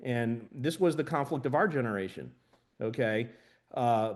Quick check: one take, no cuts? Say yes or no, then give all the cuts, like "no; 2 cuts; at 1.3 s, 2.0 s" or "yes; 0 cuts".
yes; 0 cuts